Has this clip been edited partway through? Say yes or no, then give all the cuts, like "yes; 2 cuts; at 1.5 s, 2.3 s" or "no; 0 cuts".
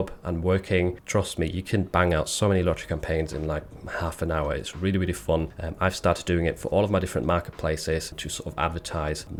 no; 0 cuts